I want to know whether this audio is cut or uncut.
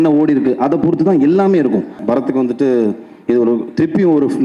cut